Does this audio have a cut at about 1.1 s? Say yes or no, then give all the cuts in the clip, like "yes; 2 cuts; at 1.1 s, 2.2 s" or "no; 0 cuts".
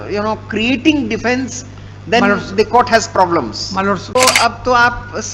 no; 1 cut; at 4.1 s